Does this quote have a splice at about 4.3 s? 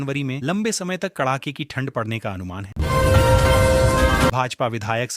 yes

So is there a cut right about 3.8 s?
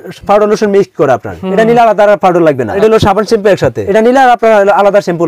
yes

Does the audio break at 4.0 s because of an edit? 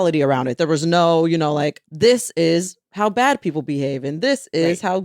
no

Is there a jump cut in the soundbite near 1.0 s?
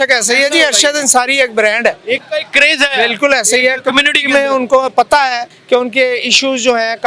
no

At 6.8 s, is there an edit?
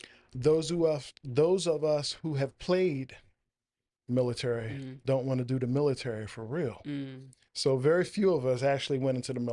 no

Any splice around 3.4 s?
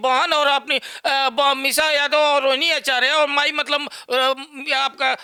no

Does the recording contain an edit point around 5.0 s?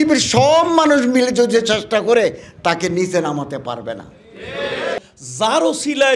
yes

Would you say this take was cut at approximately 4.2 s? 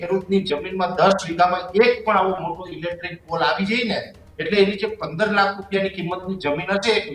no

